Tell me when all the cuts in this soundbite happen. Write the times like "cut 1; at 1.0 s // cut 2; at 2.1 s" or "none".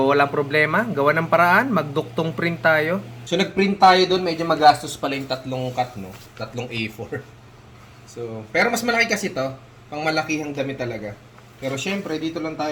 none